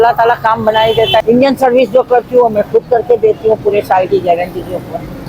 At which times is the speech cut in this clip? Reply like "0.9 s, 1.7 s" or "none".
1.2 s